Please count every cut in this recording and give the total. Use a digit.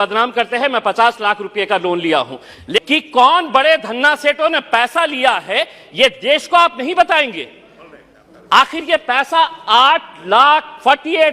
1